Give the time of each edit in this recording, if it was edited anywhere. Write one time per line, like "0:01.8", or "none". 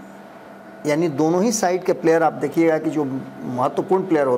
none